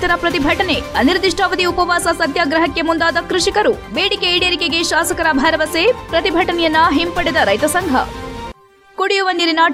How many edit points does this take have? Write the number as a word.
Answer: zero